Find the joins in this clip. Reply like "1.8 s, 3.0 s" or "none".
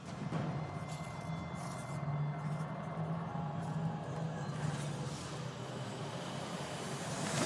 6.4 s